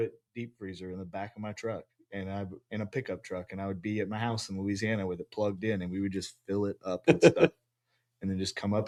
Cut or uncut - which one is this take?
uncut